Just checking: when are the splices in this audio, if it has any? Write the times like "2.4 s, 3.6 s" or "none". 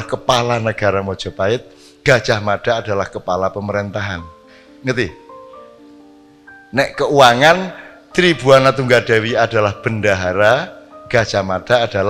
none